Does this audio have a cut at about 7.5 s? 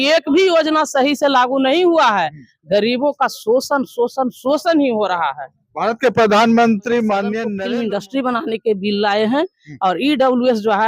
yes; 1 cut; at 7.5 s

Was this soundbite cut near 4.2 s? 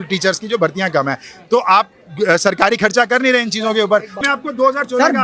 yes; 1 cut; at 4.2 s

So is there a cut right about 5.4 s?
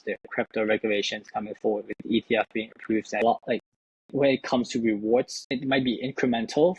yes; 2 cuts; at 3.2 s, 5.4 s

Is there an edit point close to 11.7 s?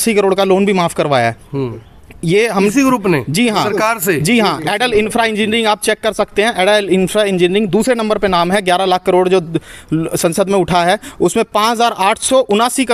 no; 0 cuts

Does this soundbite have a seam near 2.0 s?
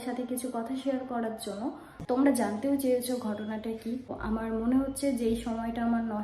yes; 1 cut; at 2.0 s

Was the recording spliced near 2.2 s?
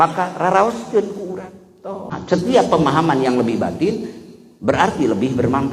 yes; 1 cut; at 2.2 s

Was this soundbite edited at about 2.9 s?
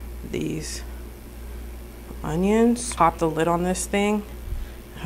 yes; 1 cut; at 2.9 s

